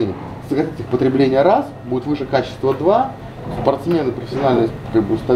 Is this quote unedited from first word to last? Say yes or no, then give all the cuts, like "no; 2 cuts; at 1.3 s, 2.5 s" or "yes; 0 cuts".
yes; 0 cuts